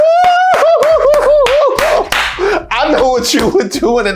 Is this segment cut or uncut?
uncut